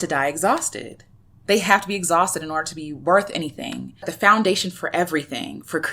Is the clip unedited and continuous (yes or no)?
no